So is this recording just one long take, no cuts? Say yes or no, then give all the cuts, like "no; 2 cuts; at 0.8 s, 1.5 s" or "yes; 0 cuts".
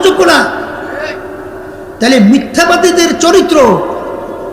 yes; 0 cuts